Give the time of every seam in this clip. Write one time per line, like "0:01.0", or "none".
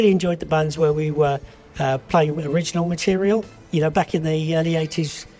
0:03.6